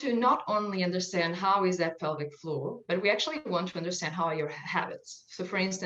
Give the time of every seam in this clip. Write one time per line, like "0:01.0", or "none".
none